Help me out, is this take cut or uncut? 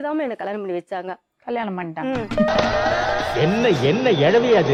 uncut